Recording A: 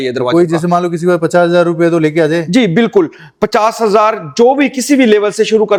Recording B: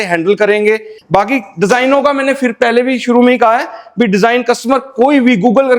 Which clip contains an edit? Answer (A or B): B